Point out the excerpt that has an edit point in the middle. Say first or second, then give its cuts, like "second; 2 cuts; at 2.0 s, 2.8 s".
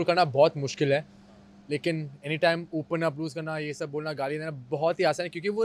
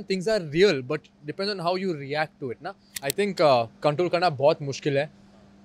second; 1 cut; at 3.0 s